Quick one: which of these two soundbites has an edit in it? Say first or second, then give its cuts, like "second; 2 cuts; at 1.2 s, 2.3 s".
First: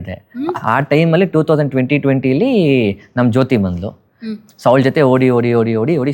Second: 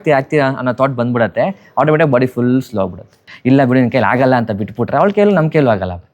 second; 1 cut; at 3.2 s